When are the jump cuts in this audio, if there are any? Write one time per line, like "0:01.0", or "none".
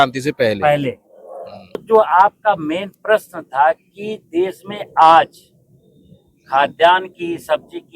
0:01.8